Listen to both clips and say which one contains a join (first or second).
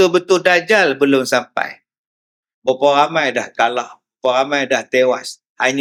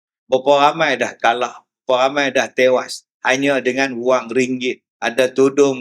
second